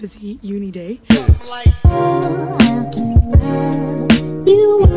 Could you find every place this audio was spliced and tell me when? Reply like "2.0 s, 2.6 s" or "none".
1.1 s